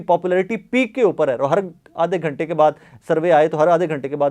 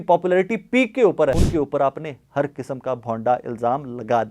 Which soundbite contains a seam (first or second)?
second